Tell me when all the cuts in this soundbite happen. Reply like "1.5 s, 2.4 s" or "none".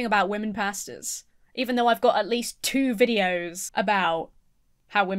3.6 s